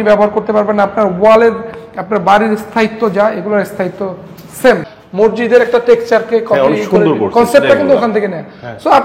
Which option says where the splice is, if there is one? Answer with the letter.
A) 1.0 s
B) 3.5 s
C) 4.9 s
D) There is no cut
C